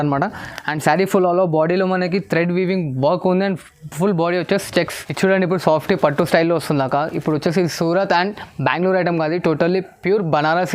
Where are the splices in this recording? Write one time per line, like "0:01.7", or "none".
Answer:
0:05.0